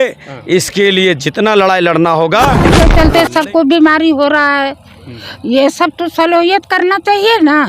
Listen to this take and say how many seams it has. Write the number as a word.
one